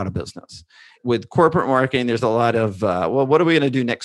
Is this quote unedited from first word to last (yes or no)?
no